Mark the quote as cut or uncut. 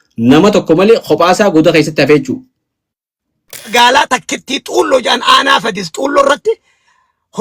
cut